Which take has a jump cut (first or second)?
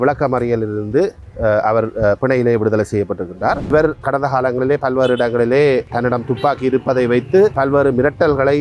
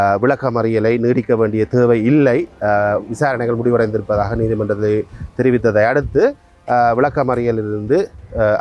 first